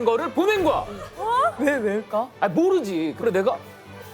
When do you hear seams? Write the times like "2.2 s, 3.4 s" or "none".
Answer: 3.1 s